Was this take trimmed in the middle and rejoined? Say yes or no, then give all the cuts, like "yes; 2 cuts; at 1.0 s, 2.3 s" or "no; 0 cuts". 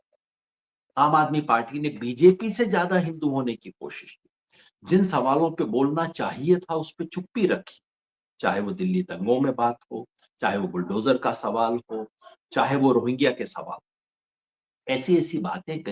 no; 0 cuts